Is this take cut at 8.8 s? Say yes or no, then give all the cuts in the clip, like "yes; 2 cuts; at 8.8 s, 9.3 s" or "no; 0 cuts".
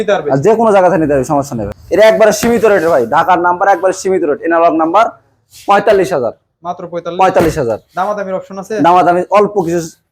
no; 1 cut; at 1.7 s